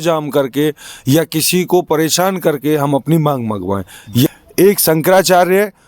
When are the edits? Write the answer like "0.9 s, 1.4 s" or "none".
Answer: 4.3 s